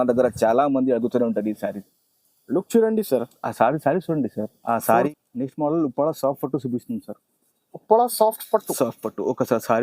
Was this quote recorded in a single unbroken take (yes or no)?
no